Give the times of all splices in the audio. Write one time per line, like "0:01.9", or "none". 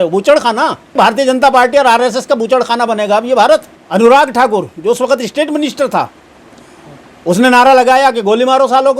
0:01.0
0:03.8